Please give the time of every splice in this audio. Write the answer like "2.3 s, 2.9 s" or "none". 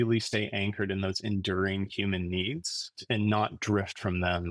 3.0 s